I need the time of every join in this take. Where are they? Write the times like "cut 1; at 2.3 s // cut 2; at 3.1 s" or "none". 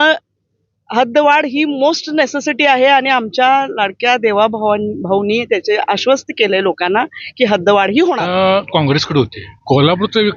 cut 1; at 8.2 s // cut 2; at 9.5 s